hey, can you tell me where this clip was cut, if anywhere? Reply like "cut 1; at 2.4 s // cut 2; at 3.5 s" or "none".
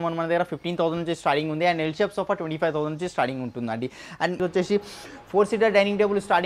cut 1; at 4.3 s